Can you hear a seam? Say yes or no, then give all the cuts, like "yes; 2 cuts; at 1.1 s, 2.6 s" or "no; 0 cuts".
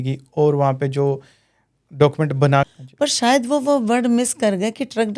yes; 1 cut; at 2.7 s